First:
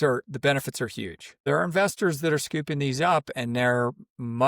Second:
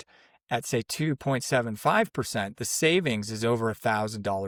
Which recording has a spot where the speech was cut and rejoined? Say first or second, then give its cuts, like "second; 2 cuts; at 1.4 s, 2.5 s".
first; 1 cut; at 1.4 s